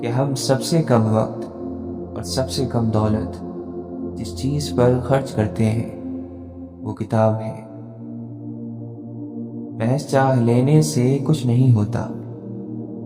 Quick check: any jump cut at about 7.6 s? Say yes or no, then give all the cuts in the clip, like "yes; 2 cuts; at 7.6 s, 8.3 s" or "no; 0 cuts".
yes; 2 cuts; at 7.6 s, 9.5 s